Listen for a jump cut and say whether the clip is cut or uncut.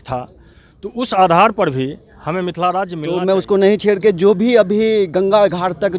cut